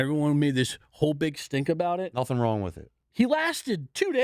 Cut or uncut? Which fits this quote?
cut